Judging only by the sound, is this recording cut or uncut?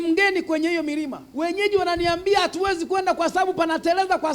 cut